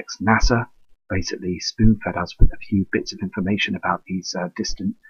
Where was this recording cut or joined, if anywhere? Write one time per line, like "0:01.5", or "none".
none